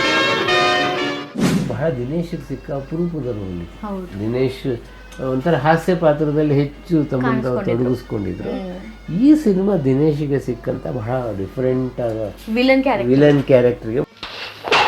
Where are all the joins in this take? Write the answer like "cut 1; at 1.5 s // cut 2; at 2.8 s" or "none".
cut 1; at 1.3 s // cut 2; at 14.0 s